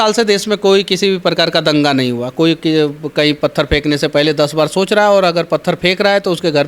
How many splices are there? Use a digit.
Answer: 0